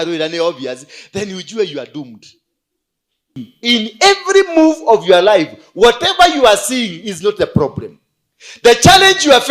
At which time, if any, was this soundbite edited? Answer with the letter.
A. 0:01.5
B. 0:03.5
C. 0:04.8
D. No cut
B